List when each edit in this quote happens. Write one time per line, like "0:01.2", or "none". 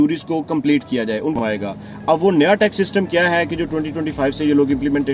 0:01.4